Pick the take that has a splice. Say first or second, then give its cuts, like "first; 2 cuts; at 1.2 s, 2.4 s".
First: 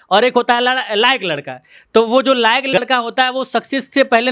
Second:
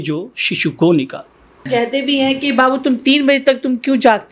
second; 1 cut; at 1.6 s